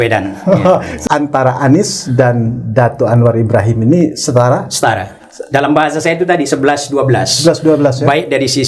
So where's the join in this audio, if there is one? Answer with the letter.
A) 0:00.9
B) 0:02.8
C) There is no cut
A